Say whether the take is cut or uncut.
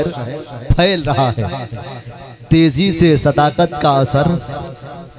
uncut